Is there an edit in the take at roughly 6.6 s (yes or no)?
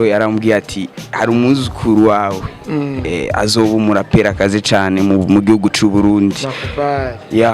no